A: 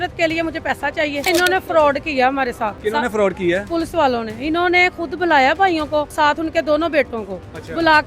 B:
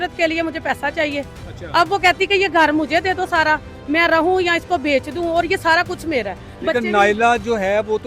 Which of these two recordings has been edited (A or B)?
A